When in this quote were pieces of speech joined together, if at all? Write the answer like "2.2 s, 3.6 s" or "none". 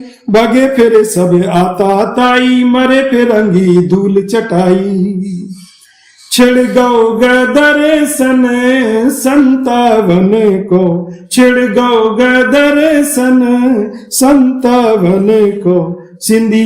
none